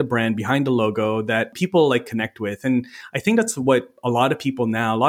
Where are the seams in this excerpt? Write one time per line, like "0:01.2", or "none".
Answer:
0:01.5